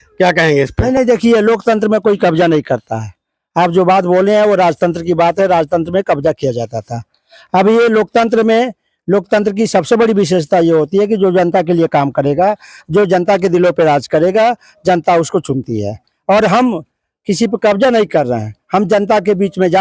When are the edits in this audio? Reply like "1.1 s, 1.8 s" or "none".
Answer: none